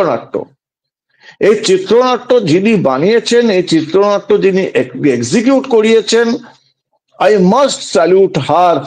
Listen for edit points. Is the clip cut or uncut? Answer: uncut